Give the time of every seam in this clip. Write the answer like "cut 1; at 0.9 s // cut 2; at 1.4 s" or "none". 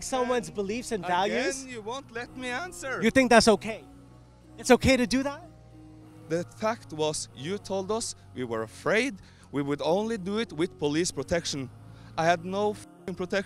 none